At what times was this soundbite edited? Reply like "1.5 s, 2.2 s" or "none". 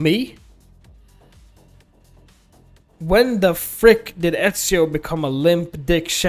none